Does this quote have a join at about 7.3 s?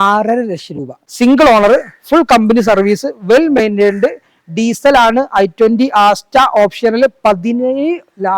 no; 1 cut; at 1.0 s

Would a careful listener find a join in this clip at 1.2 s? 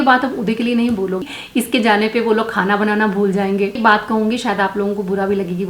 yes; 2 cuts; at 1.2 s, 3.8 s

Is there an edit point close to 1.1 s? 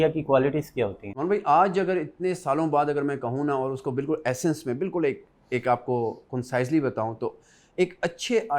yes; 1 cut; at 1.1 s

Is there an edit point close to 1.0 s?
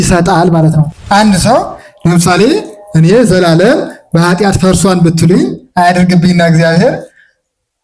yes; 1 cut; at 1.0 s

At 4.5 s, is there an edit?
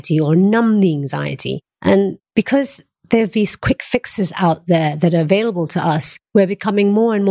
no; 2 cuts; at 2.2 s, 6.1 s

